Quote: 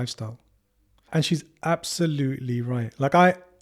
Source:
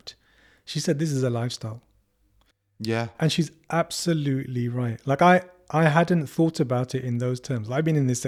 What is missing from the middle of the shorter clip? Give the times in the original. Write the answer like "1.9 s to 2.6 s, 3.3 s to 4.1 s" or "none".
2.5 s to 3.1 s